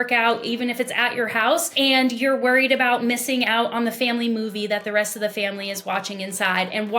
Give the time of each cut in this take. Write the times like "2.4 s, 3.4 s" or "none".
1.7 s